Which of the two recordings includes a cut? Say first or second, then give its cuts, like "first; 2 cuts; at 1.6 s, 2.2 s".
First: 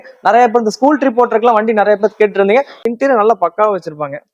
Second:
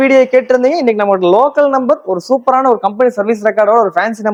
first; 1 cut; at 2.8 s